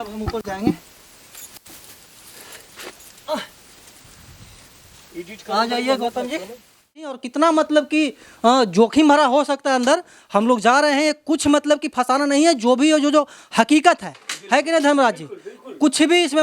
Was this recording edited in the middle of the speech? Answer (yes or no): yes